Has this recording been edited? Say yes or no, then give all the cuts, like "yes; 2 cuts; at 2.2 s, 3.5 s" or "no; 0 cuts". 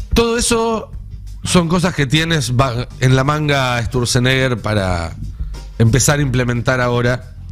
no; 0 cuts